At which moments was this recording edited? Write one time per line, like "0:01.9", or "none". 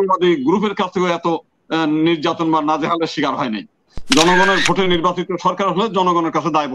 0:03.9